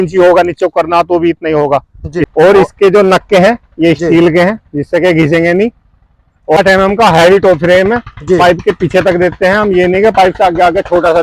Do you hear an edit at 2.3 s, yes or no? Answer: yes